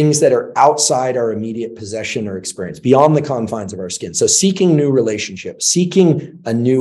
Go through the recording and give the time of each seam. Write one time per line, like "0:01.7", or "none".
none